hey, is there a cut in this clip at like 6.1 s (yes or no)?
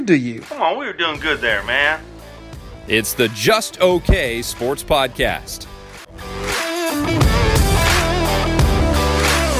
yes